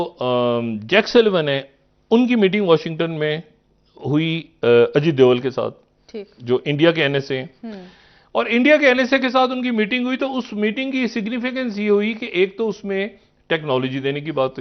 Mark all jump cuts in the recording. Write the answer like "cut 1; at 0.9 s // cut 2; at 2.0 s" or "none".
none